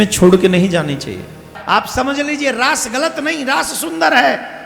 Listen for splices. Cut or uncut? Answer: cut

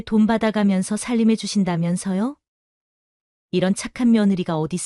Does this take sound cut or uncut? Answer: uncut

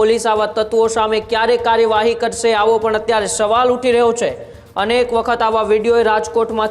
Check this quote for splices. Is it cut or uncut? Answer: uncut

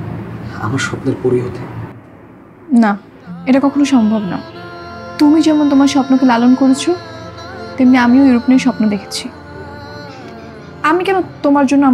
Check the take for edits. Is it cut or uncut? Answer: uncut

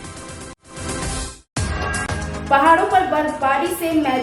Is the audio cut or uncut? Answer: cut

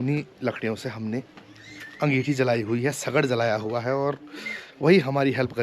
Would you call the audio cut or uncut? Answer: uncut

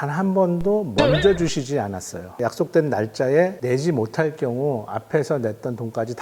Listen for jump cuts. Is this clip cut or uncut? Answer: uncut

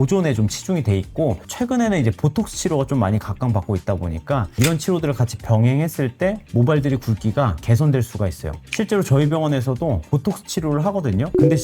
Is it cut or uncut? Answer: uncut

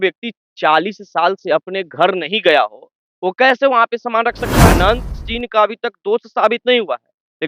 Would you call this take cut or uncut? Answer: cut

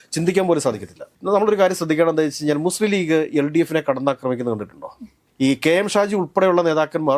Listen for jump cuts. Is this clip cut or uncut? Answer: uncut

